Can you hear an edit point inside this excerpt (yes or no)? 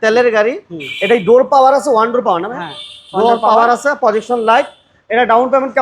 no